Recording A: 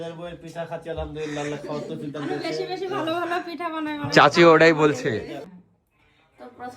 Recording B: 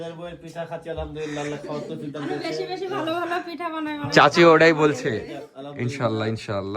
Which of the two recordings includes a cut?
A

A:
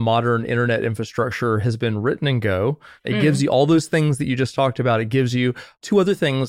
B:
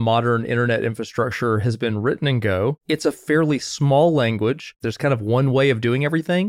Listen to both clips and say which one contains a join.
B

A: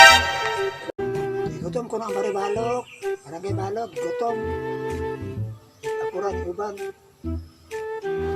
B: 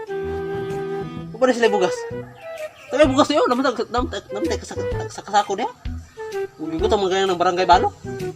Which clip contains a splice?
A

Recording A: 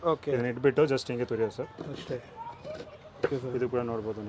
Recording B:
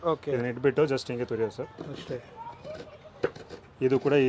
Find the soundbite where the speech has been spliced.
A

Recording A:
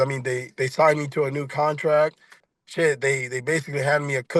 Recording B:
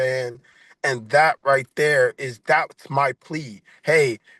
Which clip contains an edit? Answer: A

